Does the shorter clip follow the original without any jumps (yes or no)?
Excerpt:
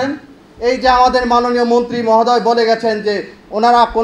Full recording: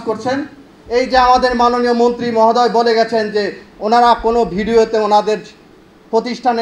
yes